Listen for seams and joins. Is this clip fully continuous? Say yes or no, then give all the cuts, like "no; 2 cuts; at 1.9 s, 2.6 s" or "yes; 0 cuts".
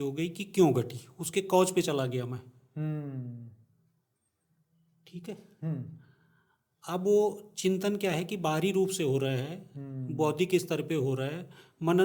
yes; 0 cuts